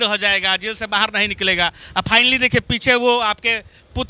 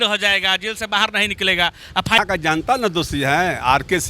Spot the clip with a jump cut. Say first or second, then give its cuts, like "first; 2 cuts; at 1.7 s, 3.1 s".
second; 1 cut; at 2.2 s